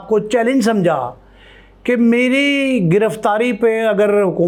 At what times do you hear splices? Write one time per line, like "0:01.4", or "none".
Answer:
none